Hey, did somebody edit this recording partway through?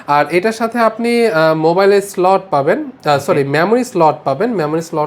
no; 0 cuts

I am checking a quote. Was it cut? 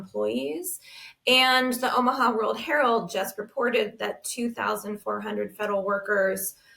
no; 0 cuts

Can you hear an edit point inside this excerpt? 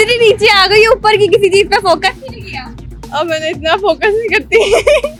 no; 0 cuts

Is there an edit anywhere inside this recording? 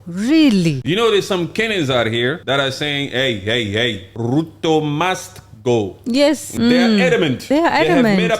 yes; 5 cuts; at 1.1 s, 2.4 s, 4.1 s, 6.5 s, 7.4 s

